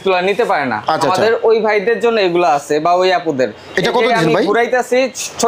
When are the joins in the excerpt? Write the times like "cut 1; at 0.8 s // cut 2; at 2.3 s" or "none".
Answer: none